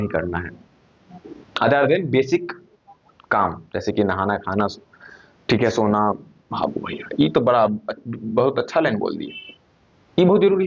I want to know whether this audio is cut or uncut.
cut